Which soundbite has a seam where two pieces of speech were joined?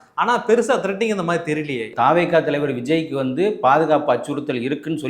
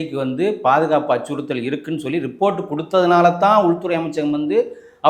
first; 1 cut; at 1.9 s

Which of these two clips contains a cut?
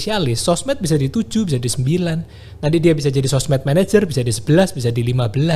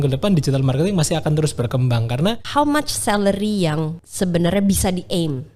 second; 2 cuts; at 2.4 s, 4.0 s

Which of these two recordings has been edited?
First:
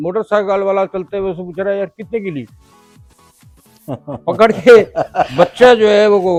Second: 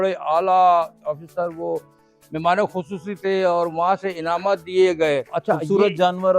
second; 1 cut; at 5.3 s

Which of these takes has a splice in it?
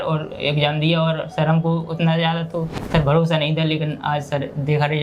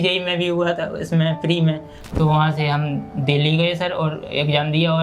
second; 1 cut; at 2.0 s

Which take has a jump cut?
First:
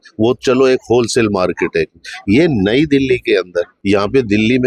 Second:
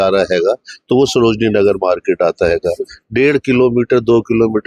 first; 1 cut; at 3.7 s

